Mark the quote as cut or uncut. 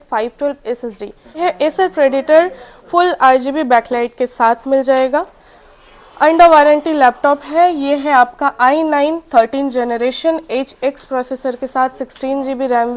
cut